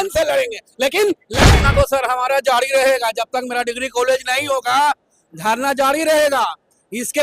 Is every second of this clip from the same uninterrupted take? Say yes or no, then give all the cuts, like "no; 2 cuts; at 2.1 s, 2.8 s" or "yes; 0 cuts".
no; 1 cut; at 1.3 s